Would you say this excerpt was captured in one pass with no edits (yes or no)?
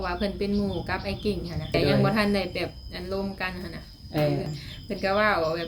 no